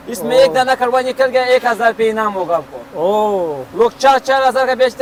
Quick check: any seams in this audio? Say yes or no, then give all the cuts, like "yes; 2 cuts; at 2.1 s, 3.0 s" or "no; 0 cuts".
no; 0 cuts